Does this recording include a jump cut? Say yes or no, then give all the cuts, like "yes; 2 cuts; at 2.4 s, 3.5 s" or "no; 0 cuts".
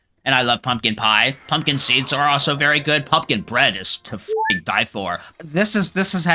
yes; 1 cut; at 5.3 s